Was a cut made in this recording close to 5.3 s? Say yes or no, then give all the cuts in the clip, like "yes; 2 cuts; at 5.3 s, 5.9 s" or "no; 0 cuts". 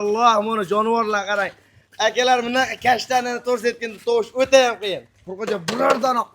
yes; 1 cut; at 5.3 s